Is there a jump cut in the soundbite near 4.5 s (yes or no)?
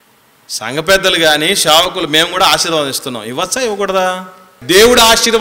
yes